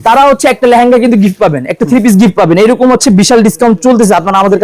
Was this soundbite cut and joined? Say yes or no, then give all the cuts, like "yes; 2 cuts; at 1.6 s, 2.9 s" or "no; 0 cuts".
no; 0 cuts